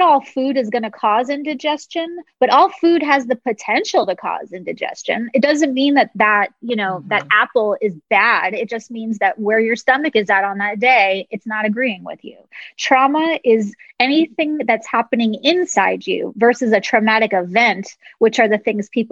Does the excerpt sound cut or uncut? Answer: uncut